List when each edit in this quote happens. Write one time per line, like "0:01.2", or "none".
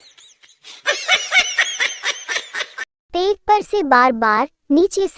0:02.9

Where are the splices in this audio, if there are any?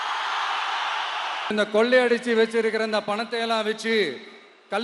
0:01.5

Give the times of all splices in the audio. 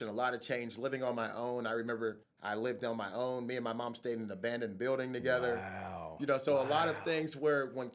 0:02.3

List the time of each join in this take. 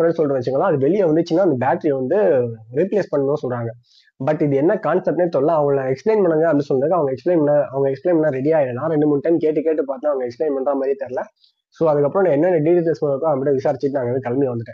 none

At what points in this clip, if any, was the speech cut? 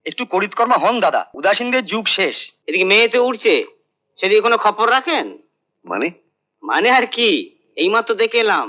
0:01.3
0:02.5

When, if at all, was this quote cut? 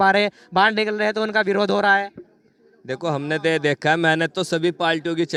none

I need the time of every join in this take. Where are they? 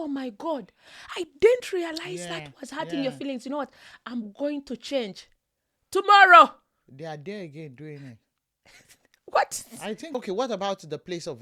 0:10.1

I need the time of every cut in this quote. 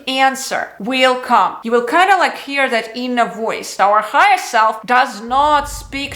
0:01.6
0:03.7

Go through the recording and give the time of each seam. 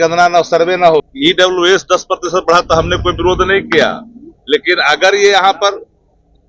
0:01.0

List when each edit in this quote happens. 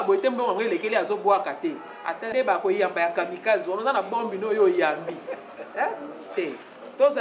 0:02.3

